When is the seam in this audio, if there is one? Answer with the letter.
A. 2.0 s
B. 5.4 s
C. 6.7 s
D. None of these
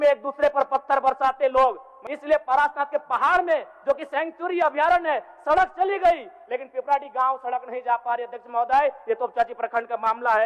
A